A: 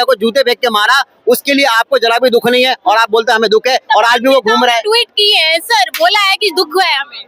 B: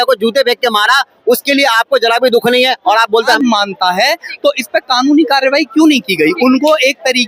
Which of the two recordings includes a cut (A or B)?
B